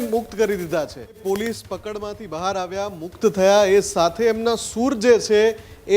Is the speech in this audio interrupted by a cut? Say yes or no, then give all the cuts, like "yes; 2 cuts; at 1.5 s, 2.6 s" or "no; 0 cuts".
yes; 1 cut; at 1.2 s